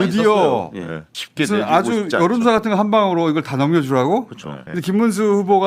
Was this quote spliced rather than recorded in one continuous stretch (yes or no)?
yes